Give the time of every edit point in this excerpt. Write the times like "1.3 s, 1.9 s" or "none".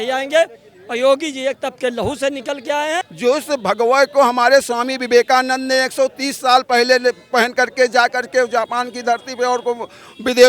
3.1 s